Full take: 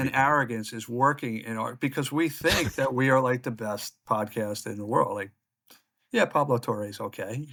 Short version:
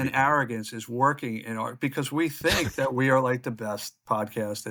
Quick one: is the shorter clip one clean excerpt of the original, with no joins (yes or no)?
yes